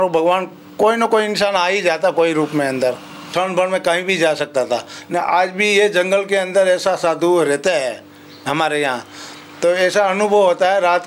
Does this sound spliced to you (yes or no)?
yes